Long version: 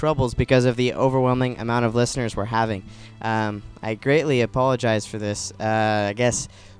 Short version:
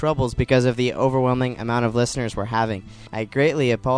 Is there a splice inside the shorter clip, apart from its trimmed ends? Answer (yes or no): yes